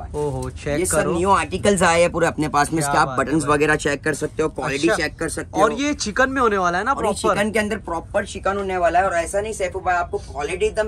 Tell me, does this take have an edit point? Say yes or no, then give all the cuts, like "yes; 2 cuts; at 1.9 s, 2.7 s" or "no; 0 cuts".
no; 0 cuts